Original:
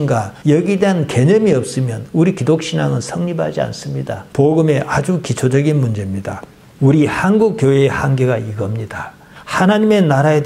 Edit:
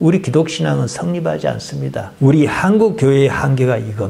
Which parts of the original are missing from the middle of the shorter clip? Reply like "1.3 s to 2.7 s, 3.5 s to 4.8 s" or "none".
4.1 s to 6.6 s